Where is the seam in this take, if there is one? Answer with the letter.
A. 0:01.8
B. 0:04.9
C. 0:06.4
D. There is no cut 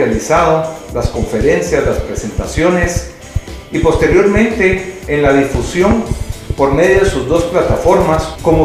B